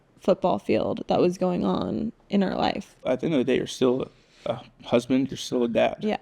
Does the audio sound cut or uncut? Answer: cut